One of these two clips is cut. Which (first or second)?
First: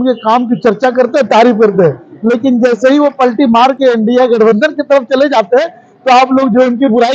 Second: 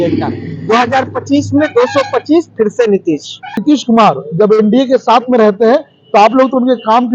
second